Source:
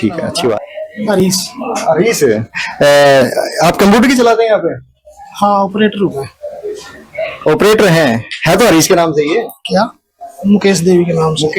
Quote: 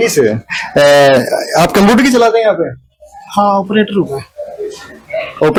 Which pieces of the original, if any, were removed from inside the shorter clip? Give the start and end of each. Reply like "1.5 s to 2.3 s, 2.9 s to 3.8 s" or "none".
none